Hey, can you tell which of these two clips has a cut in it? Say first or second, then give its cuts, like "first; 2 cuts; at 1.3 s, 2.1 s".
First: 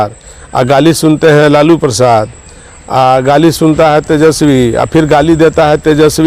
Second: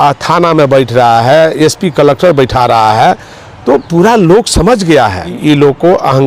second; 1 cut; at 5.3 s